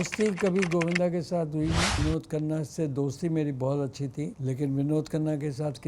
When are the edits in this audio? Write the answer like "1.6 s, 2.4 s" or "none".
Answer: 2.0 s, 4.4 s

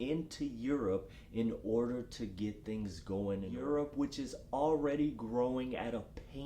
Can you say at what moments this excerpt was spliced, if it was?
3.5 s

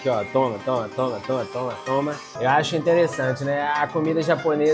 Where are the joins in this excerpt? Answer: 2.3 s

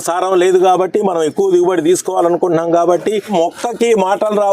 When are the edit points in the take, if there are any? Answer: 3.3 s

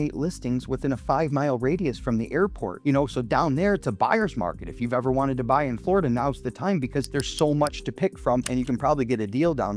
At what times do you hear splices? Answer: none

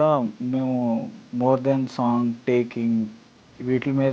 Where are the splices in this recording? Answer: 1.2 s

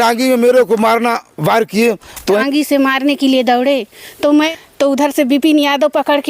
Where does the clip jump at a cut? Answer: 2.4 s, 4.6 s

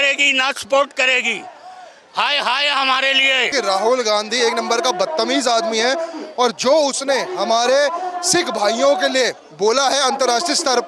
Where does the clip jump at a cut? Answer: 3.5 s

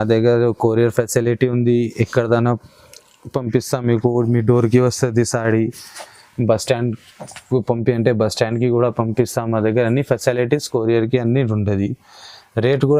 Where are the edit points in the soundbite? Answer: none

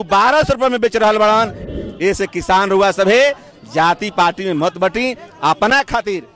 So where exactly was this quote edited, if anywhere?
1.7 s

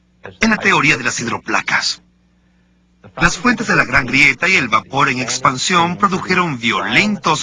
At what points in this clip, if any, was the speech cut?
3.2 s

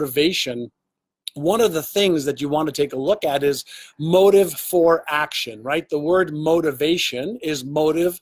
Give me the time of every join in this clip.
none

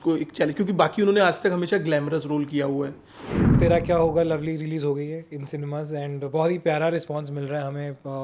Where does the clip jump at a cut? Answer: 3.4 s

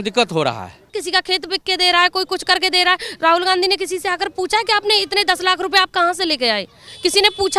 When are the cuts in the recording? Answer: 1.0 s

